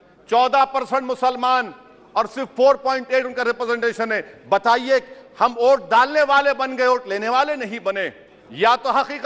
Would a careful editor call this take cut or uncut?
uncut